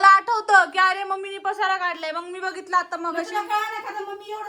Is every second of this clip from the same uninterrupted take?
yes; 0 cuts

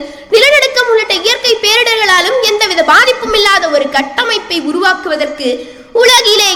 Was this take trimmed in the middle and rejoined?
no; 0 cuts

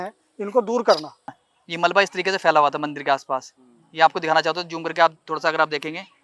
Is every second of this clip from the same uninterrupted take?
no; 1 cut; at 1.2 s

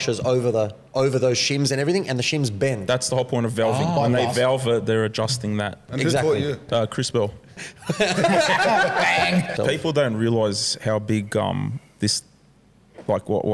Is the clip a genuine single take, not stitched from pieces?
no; 2 cuts; at 7.6 s, 9.5 s

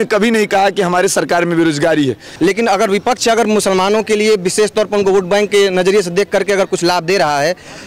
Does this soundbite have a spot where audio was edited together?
yes; 1 cut; at 2.2 s

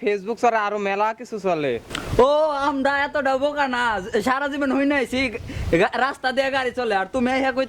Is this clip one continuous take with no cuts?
no; 1 cut; at 2.0 s

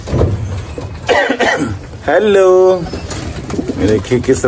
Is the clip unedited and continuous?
yes; 0 cuts

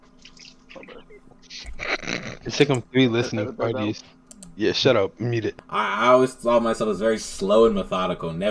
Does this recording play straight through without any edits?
no; 1 cut; at 5.6 s

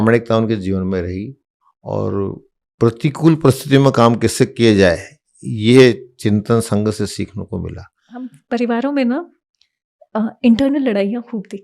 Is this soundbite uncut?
no; 1 cut; at 8.4 s

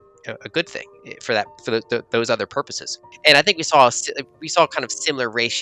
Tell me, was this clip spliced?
yes; 1 cut; at 3.0 s

